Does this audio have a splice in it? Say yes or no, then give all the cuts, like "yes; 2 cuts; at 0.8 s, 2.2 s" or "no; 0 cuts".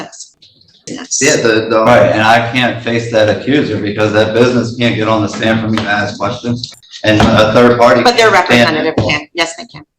yes; 1 cut; at 1.9 s